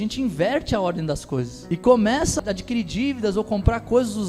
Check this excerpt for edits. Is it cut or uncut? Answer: cut